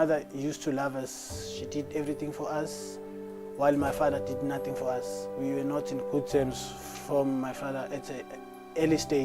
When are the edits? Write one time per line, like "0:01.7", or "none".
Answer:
0:05.2